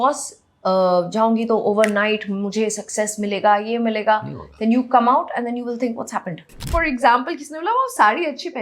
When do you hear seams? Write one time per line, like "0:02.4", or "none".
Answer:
0:06.7